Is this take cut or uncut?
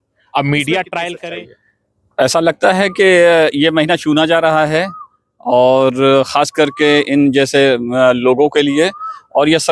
cut